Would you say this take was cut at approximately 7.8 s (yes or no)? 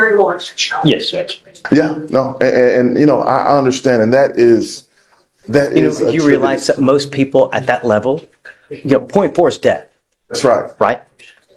no